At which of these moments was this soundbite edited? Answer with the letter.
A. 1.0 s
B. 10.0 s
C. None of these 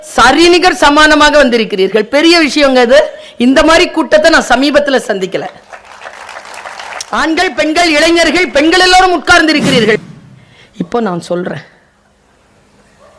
B